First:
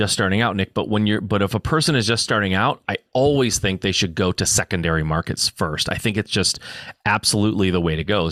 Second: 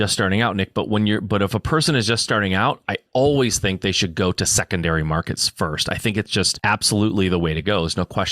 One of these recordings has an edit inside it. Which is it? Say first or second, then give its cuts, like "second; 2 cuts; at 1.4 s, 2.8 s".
second; 1 cut; at 6.5 s